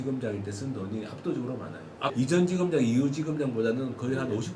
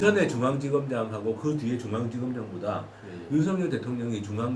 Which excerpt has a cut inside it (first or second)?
first